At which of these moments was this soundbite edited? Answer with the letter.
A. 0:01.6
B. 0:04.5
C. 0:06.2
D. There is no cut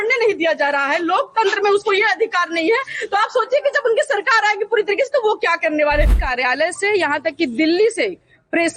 C